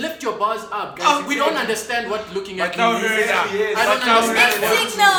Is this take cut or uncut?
uncut